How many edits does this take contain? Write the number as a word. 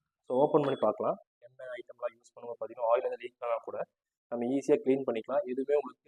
one